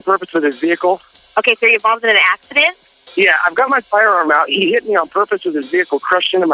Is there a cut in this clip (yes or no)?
yes